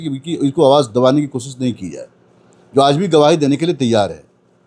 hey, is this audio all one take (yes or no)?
yes